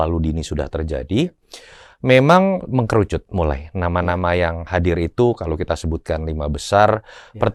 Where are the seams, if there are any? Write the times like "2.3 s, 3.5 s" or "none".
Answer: none